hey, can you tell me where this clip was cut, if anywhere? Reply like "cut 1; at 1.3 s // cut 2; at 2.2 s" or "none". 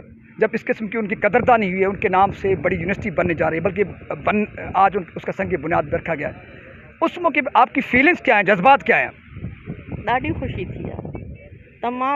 none